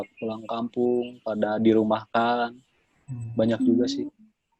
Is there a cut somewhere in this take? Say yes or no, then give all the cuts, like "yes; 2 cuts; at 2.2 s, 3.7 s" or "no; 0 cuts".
no; 0 cuts